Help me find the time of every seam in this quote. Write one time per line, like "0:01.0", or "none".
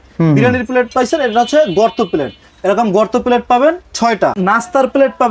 0:04.4